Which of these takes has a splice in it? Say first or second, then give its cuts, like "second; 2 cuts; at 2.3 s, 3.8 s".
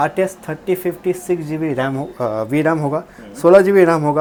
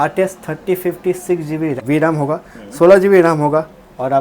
second; 1 cut; at 1.8 s